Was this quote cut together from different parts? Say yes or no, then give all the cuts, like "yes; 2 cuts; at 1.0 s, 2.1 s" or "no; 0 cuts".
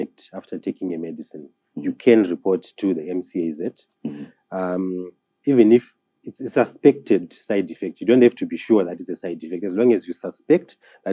no; 0 cuts